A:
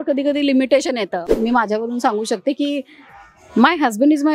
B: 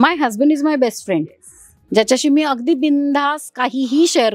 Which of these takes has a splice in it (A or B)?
A